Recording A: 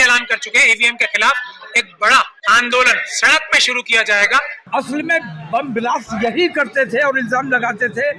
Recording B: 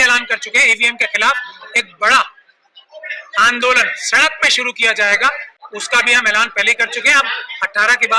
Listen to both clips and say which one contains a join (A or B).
A